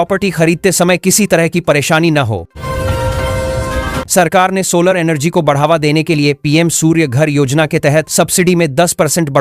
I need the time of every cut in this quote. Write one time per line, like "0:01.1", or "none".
0:02.5
0:04.0